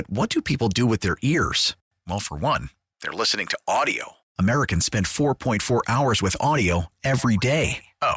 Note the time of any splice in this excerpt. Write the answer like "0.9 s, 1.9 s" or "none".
none